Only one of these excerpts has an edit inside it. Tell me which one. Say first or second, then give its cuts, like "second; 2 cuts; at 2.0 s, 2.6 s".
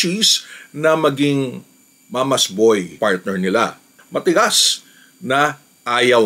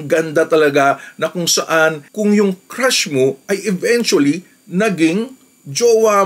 first; 2 cuts; at 2.9 s, 4.0 s